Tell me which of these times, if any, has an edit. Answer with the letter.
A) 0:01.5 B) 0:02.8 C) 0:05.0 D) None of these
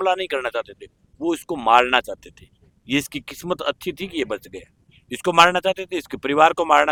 D